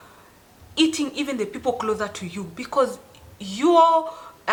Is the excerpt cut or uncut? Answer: uncut